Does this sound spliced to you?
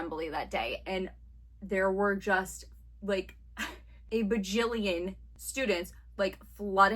no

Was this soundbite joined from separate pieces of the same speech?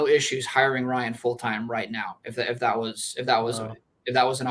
no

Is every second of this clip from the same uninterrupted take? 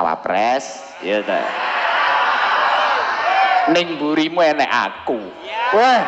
yes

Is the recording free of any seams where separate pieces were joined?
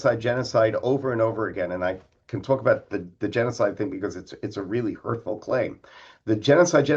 yes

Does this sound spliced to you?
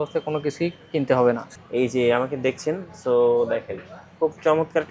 yes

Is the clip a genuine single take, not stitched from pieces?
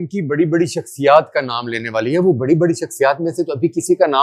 yes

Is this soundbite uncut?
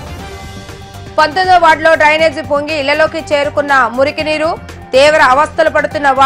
no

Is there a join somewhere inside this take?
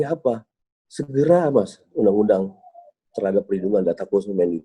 no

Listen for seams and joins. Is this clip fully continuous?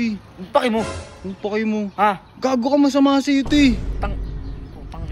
yes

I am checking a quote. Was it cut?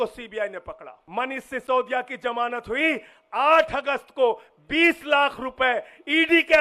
yes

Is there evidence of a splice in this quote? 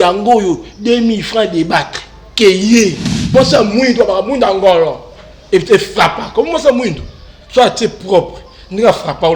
yes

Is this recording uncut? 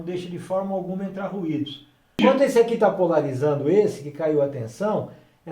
no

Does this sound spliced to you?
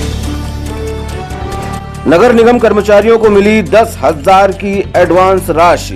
no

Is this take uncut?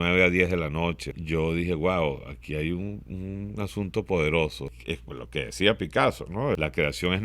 no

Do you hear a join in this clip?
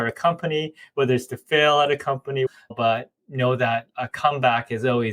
yes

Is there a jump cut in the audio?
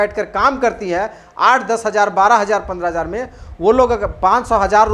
no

